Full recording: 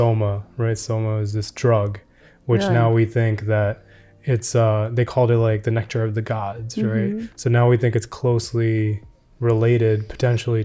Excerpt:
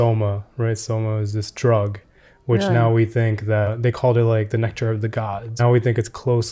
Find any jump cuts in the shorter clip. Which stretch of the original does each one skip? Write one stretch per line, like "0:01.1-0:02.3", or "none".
0:03.7-0:04.9
0:06.7-0:07.5